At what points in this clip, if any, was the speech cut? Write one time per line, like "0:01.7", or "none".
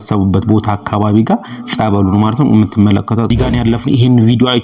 0:03.3